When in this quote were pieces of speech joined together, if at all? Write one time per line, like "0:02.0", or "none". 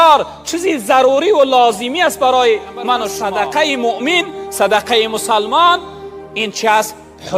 0:03.1